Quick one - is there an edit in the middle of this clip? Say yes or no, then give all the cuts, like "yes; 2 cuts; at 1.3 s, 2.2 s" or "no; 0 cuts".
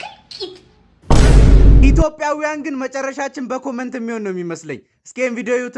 yes; 1 cut; at 1.1 s